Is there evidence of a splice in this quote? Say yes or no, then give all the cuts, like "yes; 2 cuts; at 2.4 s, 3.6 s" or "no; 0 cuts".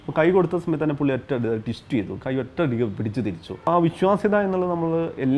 yes; 1 cut; at 3.7 s